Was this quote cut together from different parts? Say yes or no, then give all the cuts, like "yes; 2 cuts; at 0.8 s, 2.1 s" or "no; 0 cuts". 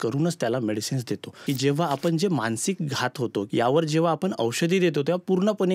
yes; 2 cuts; at 1.4 s, 3.5 s